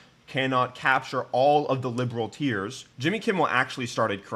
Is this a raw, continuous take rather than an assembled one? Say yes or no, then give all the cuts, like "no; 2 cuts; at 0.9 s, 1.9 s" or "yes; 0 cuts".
no; 1 cut; at 2.8 s